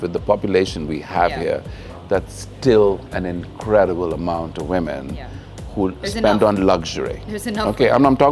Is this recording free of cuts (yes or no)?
yes